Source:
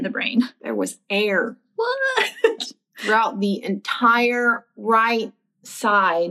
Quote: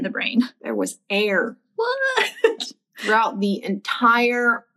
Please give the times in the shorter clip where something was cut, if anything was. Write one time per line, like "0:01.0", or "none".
none